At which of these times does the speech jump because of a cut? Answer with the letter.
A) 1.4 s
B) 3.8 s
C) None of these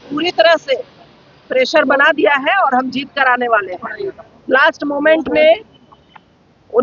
C